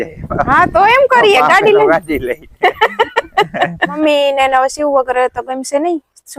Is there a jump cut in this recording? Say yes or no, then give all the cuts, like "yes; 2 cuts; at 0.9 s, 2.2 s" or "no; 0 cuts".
yes; 1 cut; at 4.0 s